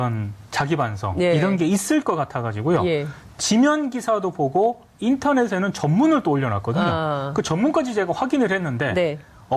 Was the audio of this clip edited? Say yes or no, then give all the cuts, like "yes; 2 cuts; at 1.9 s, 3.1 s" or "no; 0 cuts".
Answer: no; 0 cuts